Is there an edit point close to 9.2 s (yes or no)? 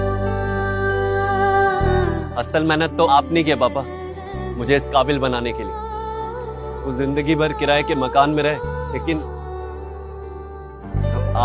no